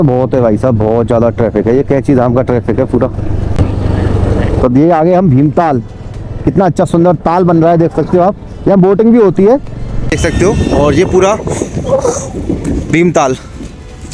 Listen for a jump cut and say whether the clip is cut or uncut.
cut